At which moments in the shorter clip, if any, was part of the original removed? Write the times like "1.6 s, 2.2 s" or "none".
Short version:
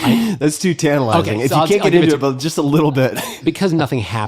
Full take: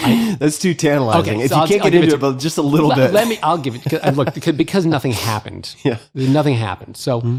3.1 s

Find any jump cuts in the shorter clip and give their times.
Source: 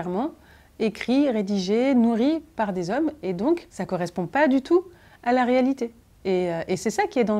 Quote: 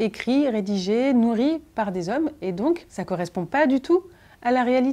none

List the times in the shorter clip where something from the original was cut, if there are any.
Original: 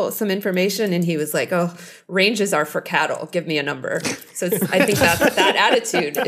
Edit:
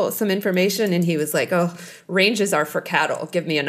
none

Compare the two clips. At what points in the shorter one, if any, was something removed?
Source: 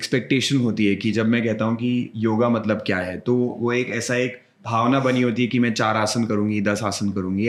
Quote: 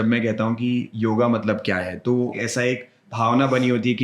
2.4 s

